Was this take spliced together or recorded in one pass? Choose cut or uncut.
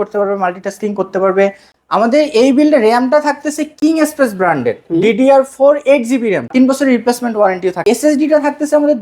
cut